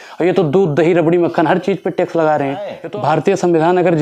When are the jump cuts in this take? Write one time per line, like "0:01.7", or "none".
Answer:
0:02.8